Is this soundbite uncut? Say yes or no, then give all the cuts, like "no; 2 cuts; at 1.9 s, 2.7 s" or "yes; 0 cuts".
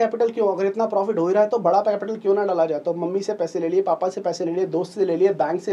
yes; 0 cuts